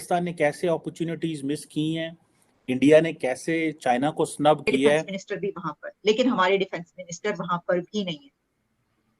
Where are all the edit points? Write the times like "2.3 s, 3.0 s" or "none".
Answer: 5.0 s